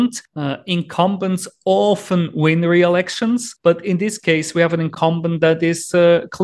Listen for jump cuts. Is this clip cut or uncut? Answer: uncut